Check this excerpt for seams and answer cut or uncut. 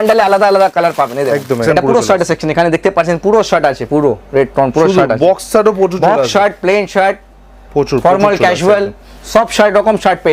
cut